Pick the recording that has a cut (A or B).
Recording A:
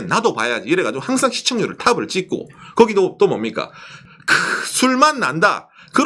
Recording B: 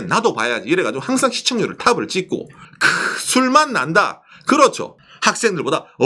B